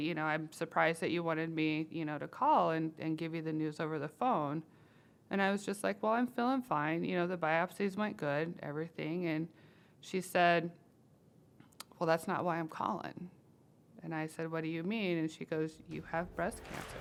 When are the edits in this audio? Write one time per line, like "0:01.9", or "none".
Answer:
none